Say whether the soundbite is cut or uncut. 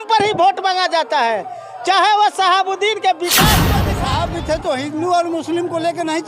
cut